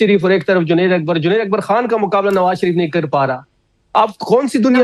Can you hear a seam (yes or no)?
no